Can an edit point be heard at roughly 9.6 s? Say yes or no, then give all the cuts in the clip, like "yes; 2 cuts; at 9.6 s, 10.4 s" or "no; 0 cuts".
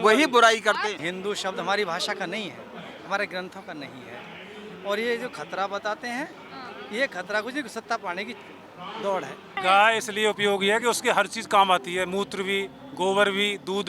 yes; 2 cuts; at 1.0 s, 9.6 s